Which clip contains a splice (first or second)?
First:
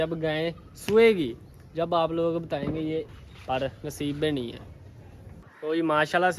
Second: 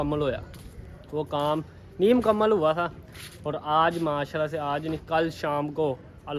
first